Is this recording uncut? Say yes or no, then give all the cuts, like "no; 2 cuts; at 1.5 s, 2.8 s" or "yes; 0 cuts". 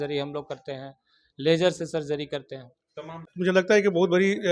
no; 1 cut; at 3.3 s